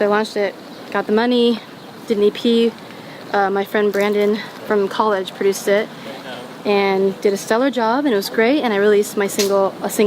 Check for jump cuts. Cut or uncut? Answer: uncut